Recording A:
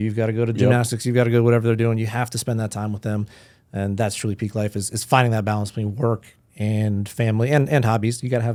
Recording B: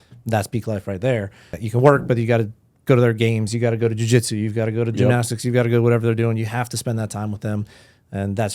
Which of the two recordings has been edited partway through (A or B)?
B